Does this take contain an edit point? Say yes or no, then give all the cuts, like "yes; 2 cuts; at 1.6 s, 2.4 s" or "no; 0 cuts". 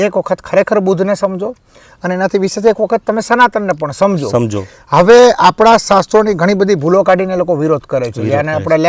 no; 0 cuts